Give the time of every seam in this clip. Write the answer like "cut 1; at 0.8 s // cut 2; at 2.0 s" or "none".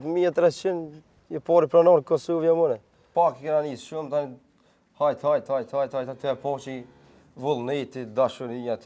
cut 1; at 3.0 s